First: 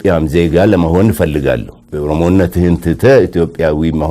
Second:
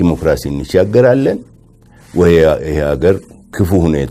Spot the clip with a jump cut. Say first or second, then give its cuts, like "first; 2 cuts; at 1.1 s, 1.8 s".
first; 1 cut; at 1.8 s